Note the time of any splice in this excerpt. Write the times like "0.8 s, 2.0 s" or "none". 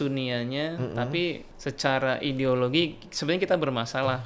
1.5 s